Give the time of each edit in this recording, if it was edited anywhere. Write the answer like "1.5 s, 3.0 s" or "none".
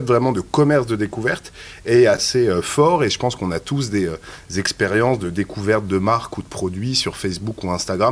2.2 s